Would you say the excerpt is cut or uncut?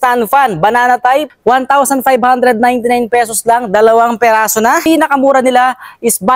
cut